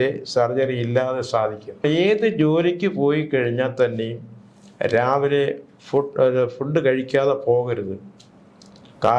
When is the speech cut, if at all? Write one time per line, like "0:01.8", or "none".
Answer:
0:01.8